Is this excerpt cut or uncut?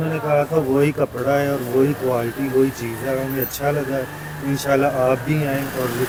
uncut